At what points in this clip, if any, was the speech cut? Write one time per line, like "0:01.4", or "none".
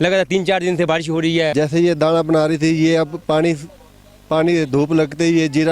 0:01.5